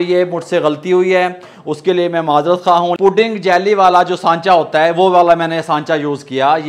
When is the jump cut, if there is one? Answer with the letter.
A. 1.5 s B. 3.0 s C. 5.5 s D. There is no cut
B